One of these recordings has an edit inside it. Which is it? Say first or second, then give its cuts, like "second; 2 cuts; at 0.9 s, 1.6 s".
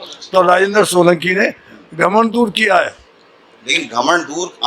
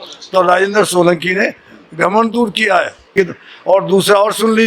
second; 1 cut; at 3.1 s